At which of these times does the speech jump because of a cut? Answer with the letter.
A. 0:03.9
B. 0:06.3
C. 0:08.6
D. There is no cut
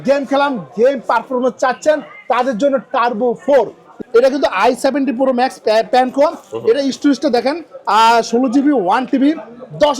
A